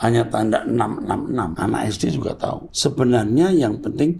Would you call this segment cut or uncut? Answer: cut